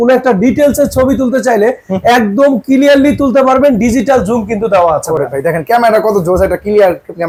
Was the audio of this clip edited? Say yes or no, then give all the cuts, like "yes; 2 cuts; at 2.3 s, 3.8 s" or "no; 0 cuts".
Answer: no; 0 cuts